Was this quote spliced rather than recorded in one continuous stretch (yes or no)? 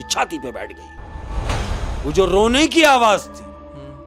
yes